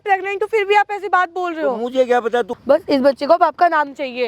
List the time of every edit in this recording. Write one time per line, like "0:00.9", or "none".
0:02.5